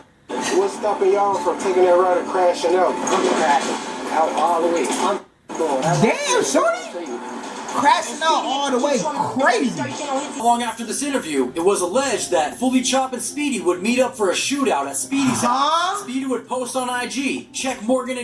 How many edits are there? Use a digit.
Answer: 1